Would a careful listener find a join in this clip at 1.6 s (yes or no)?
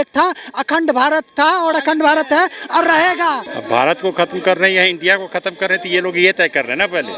no